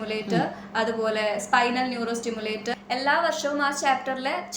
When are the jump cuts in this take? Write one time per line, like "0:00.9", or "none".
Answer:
0:02.7